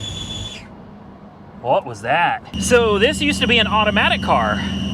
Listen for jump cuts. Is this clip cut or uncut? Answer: cut